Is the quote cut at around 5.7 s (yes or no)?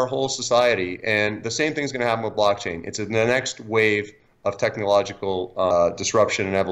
yes